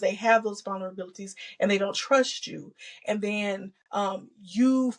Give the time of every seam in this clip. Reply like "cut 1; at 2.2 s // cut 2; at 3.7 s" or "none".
none